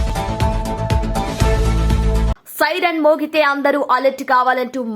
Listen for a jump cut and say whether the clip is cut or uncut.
cut